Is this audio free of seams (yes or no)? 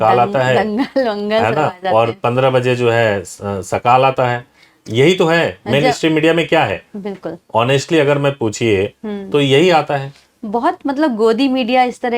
yes